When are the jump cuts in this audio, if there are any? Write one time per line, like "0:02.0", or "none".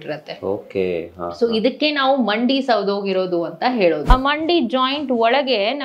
0:04.0